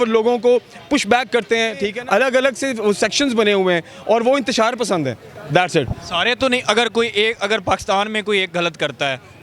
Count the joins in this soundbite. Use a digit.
1